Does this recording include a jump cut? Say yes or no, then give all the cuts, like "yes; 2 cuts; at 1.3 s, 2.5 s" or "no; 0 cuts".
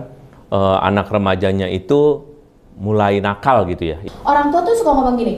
yes; 1 cut; at 4.0 s